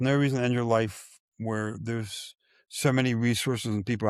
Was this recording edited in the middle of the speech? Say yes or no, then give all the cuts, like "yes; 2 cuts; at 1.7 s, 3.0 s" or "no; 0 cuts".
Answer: no; 0 cuts